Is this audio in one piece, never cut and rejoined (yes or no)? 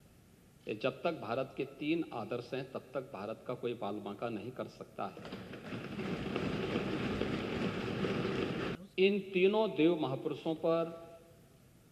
no